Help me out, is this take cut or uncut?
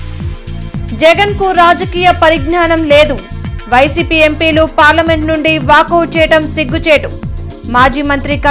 uncut